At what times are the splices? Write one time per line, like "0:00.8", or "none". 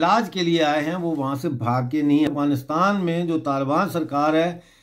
0:02.3